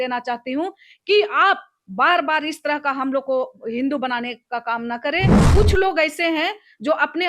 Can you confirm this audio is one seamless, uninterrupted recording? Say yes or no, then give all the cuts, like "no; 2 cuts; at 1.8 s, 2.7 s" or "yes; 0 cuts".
no; 1 cut; at 5.4 s